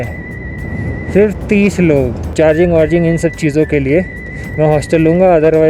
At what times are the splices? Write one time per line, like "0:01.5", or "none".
0:02.2